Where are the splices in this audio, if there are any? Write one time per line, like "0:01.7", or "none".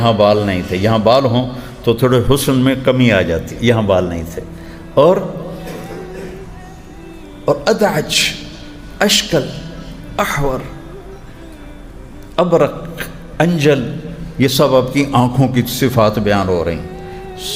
none